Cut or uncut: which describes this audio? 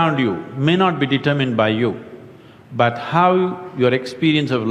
uncut